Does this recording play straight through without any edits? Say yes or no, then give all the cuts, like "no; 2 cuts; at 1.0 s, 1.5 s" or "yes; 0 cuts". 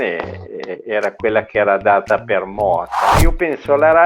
no; 1 cut; at 3.0 s